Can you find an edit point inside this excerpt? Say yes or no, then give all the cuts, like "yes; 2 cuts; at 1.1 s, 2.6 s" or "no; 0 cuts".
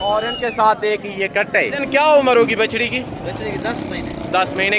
yes; 1 cut; at 1.8 s